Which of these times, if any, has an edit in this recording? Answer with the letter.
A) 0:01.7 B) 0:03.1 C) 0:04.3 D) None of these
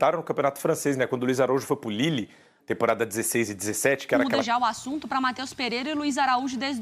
C